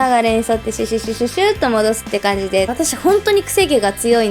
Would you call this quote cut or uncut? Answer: cut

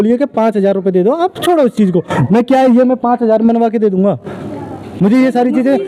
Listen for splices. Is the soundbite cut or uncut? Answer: uncut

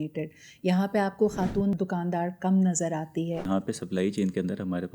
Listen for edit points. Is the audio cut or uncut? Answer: cut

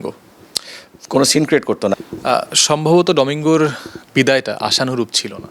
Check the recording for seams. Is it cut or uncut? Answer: cut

